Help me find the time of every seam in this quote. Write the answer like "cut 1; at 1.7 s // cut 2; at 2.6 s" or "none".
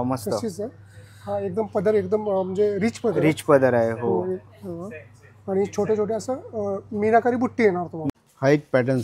cut 1; at 8.0 s